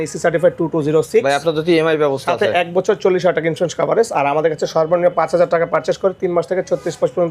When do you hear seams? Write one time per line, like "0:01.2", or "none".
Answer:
none